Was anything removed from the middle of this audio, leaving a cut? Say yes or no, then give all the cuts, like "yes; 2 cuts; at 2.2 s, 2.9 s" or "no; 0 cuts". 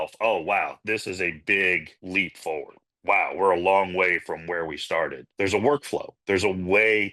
yes; 2 cuts; at 2.8 s, 5.3 s